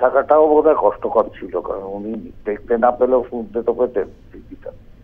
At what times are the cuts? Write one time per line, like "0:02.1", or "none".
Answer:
0:02.3